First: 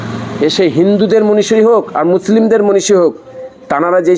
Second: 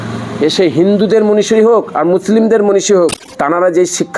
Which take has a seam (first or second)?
second